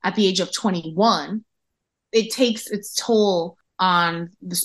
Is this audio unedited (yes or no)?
no